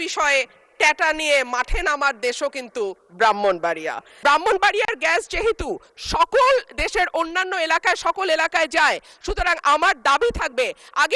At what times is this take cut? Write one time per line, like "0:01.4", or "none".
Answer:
0:04.1

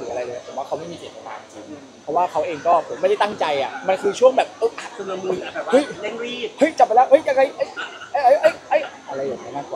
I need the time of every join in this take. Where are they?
none

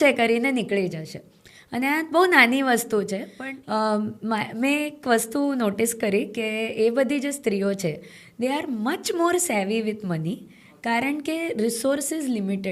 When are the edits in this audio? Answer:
0:03.3

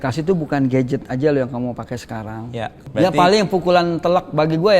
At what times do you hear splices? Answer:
0:02.9

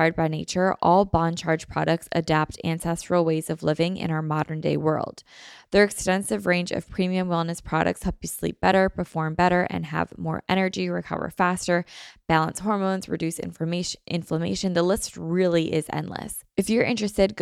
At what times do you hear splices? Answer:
0:16.4

